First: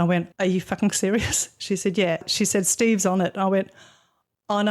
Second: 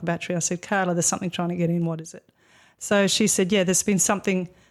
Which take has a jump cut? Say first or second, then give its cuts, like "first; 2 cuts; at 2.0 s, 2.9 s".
first; 1 cut; at 2.3 s